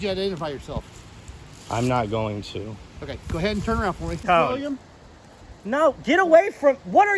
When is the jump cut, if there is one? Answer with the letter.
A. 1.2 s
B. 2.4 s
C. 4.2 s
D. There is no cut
C